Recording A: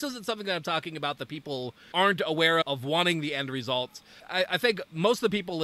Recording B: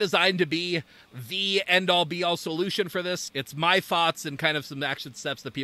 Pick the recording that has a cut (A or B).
A